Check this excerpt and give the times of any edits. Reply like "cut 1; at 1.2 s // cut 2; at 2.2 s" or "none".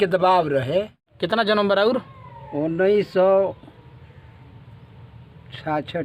cut 1; at 1.0 s